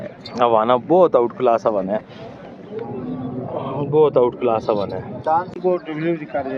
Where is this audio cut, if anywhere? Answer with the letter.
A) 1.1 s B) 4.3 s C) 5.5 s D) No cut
C